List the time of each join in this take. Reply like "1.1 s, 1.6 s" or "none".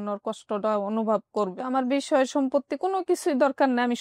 1.6 s